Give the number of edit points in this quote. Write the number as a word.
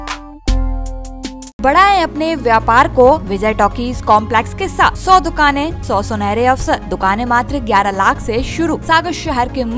six